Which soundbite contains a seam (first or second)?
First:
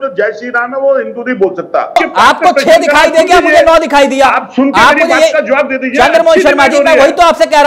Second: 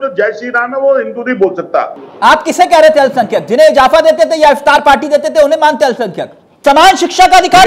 second